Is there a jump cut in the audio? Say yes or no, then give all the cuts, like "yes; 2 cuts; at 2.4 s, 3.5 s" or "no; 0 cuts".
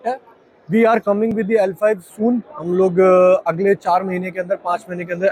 no; 0 cuts